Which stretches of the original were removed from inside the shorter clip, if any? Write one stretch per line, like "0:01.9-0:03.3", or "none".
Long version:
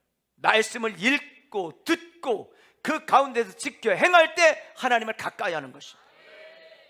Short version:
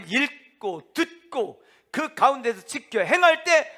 none